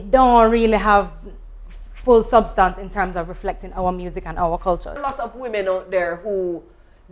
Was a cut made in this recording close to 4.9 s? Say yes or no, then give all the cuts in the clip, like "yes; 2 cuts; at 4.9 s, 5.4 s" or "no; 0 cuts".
yes; 1 cut; at 4.9 s